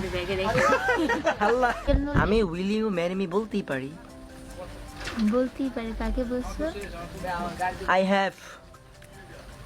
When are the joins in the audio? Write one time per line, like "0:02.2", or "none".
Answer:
0:01.8